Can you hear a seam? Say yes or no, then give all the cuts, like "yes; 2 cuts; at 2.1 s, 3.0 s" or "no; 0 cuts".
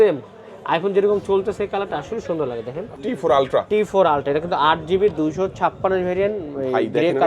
yes; 1 cut; at 2.9 s